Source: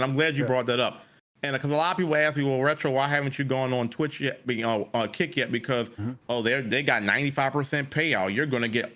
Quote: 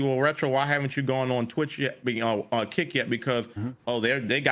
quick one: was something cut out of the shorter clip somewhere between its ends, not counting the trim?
no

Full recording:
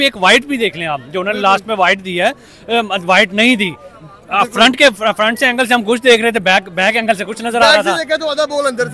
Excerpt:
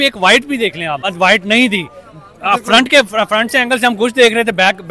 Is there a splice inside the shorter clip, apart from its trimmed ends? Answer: yes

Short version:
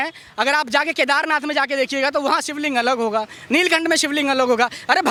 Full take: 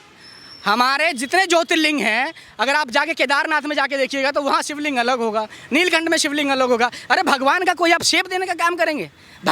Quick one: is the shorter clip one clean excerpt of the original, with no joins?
yes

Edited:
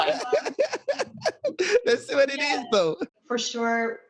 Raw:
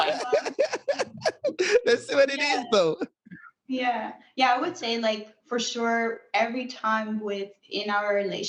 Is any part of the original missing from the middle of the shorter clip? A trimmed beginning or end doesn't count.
yes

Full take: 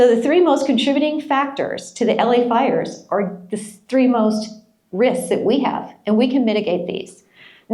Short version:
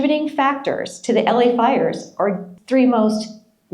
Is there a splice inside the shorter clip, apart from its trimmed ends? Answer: yes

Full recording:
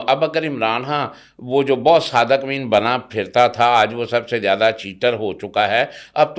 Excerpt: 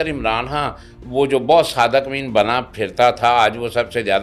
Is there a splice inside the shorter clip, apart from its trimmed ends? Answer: no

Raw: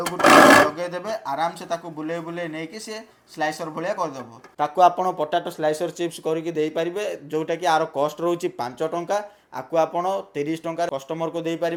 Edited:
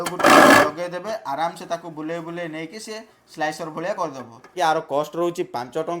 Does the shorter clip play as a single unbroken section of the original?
no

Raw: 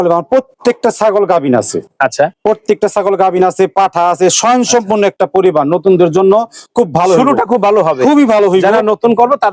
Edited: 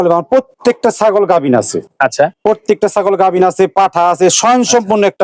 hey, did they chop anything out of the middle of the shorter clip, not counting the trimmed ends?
no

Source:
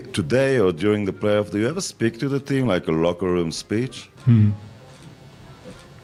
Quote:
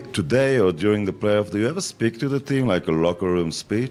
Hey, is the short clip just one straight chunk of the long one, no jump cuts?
yes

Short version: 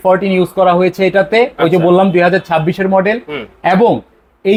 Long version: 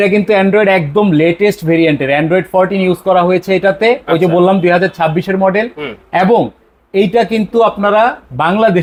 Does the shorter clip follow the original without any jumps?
yes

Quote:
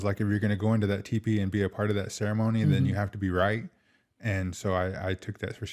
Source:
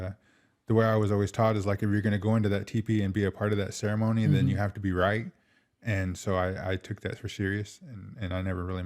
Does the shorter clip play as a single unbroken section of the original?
yes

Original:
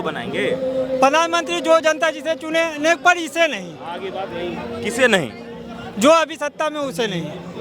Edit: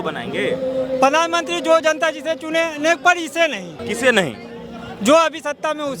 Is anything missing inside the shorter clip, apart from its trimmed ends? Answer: yes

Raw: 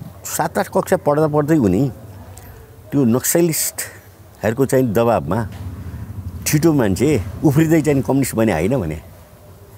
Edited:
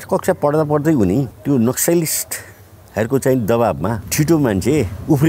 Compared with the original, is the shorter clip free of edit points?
no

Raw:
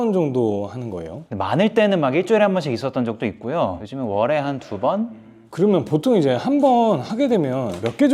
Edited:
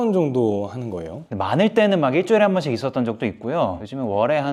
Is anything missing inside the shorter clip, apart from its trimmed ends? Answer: no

